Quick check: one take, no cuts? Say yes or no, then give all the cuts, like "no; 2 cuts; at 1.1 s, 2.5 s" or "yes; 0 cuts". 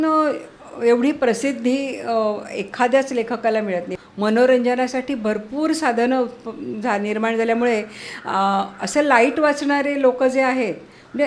no; 1 cut; at 3.9 s